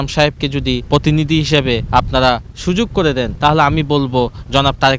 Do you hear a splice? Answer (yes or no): yes